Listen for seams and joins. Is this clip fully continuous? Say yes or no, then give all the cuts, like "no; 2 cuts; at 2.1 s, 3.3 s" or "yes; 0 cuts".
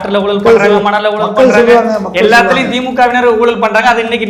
yes; 0 cuts